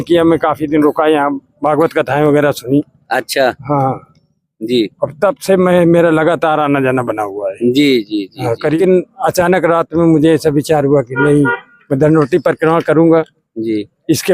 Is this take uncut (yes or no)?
no